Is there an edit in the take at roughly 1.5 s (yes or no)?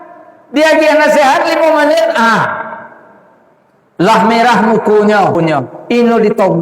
no